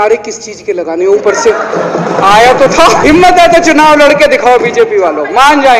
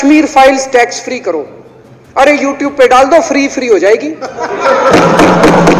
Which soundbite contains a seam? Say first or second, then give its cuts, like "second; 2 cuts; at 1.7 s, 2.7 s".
first; 1 cut; at 3.0 s